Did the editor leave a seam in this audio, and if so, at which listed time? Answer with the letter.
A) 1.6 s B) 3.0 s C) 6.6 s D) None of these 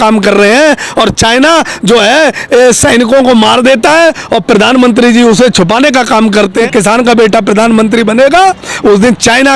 C